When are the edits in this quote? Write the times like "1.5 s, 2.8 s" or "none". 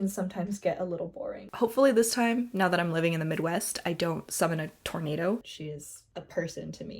1.5 s, 5.5 s